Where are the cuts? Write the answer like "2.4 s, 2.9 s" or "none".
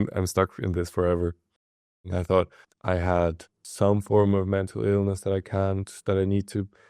2.1 s, 2.6 s, 3.6 s